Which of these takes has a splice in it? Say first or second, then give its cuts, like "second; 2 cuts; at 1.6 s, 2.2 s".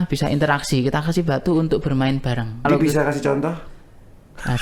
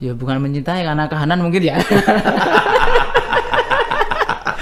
first; 1 cut; at 2.7 s